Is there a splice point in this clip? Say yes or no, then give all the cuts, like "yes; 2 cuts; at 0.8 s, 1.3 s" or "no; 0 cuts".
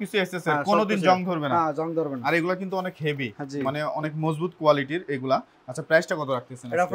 no; 0 cuts